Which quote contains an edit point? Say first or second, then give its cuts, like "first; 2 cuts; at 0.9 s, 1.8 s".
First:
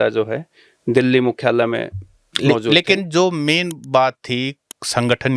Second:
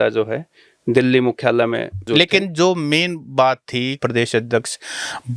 second; 2 cuts; at 2.1 s, 4.0 s